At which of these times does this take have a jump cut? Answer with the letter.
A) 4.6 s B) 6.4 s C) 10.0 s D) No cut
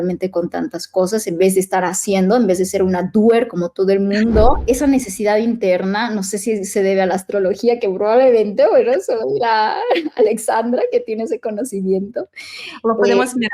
A